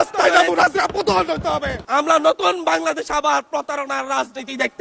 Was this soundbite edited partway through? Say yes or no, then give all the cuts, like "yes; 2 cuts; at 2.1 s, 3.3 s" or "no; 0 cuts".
yes; 1 cut; at 1.8 s